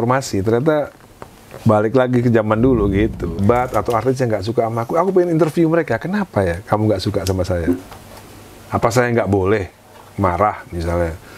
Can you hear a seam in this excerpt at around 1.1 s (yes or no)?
no